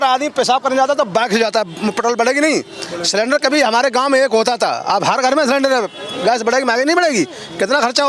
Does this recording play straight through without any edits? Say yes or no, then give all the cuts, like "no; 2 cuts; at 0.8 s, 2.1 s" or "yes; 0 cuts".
yes; 0 cuts